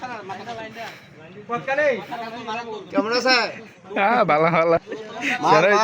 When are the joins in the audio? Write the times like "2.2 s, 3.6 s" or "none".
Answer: 4.8 s